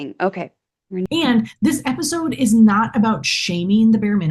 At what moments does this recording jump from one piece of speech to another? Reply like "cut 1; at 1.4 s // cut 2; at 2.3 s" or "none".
cut 1; at 1.1 s

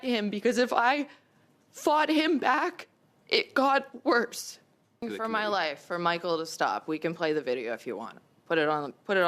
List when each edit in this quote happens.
cut 1; at 5.1 s

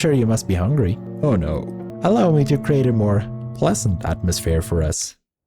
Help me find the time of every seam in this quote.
cut 1; at 1.1 s

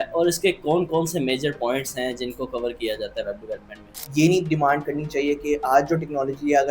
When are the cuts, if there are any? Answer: cut 1; at 4.0 s

